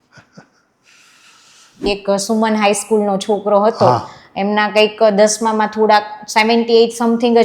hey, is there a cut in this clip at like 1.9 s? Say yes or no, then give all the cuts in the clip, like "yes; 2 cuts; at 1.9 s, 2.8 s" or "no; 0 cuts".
yes; 1 cut; at 1.9 s